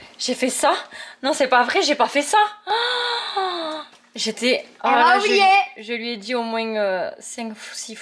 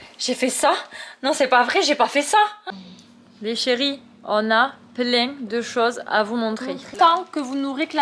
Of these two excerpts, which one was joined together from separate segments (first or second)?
second